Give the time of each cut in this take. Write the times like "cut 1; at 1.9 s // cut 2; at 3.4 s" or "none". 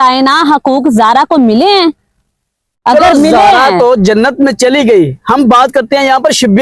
none